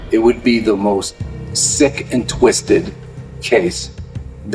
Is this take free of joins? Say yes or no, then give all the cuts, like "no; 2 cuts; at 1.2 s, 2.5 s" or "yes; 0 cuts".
yes; 0 cuts